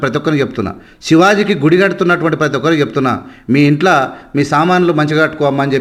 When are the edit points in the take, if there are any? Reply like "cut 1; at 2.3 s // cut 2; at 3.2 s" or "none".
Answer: none